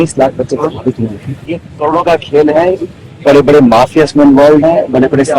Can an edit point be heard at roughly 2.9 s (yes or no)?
no